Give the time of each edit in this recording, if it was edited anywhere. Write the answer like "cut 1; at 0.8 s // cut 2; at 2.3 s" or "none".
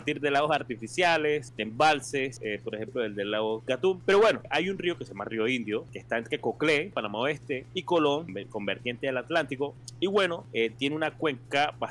cut 1; at 1.6 s // cut 2; at 2.4 s // cut 3; at 3.7 s // cut 4; at 4.5 s // cut 5; at 6.0 s // cut 6; at 7.3 s // cut 7; at 8.4 s // cut 8; at 9.8 s // cut 9; at 10.4 s